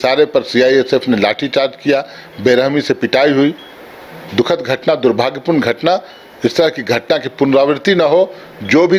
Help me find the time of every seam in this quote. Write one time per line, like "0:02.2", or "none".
none